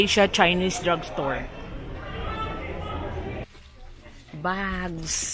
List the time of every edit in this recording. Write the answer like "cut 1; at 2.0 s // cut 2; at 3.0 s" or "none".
cut 1; at 3.4 s